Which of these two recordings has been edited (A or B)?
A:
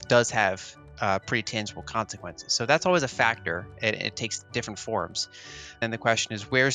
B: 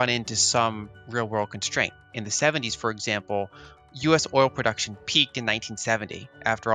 A